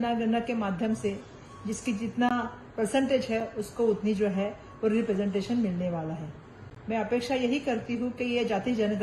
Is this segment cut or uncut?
uncut